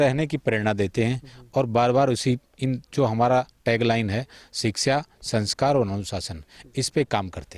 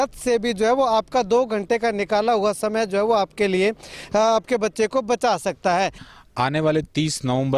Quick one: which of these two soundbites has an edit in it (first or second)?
second